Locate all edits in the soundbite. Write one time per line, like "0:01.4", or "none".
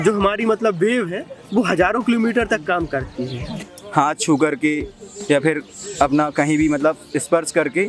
0:03.7